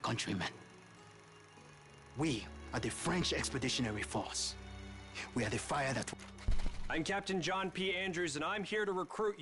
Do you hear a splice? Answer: yes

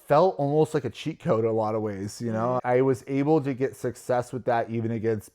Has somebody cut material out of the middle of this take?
yes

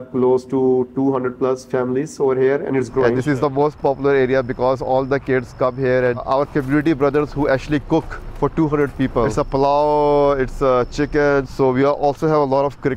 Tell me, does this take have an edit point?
yes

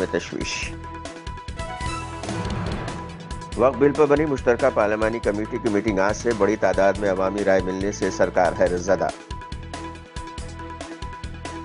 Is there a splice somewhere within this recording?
no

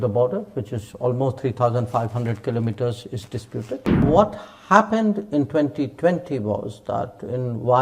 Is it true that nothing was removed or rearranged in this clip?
no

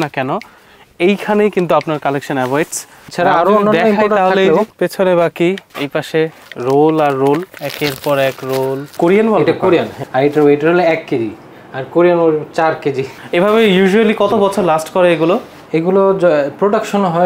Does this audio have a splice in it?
yes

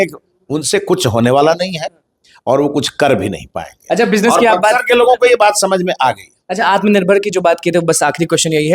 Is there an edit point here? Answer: no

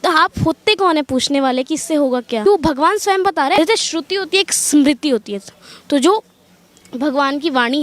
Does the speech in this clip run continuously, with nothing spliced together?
no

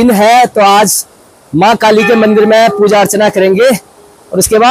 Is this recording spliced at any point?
no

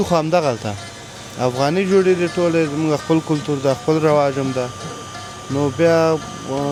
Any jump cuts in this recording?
no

